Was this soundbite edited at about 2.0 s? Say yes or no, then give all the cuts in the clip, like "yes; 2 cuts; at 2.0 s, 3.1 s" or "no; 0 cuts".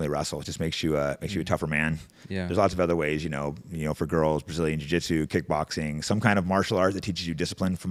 no; 0 cuts